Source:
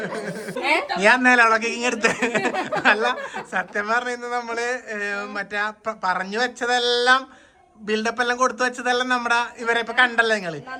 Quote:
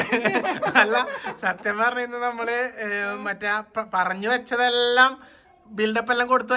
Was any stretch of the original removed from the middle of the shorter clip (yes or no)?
no